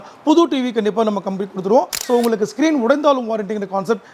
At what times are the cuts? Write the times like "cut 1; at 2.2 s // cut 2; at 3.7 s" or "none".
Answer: cut 1; at 2.0 s